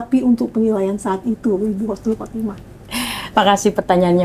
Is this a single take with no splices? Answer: yes; 0 cuts

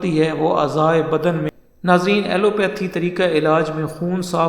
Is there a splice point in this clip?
yes; 1 cut; at 1.5 s

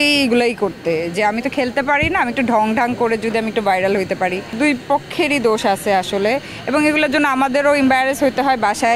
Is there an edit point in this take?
no; 0 cuts

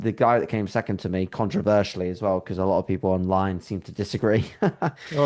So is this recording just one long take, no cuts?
yes; 0 cuts

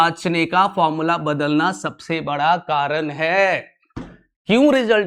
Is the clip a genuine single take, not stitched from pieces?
yes; 0 cuts

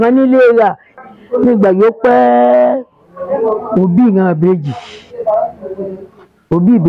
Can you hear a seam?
yes; 1 cut; at 0.9 s

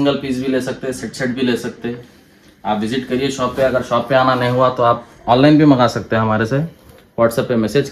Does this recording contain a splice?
no; 0 cuts

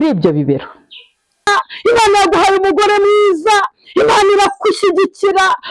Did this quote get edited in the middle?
yes; 1 cut; at 1.5 s

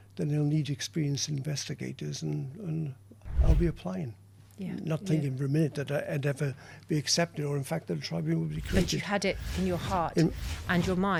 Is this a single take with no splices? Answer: yes; 0 cuts

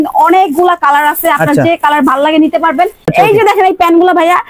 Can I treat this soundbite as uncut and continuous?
no; 1 cut; at 3.1 s

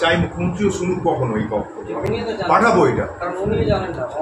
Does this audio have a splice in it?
no; 0 cuts

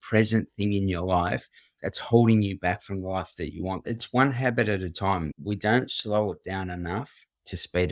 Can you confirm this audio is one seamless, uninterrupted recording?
no; 2 cuts; at 3.9 s, 5.3 s

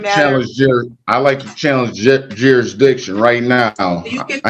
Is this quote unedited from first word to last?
yes; 0 cuts

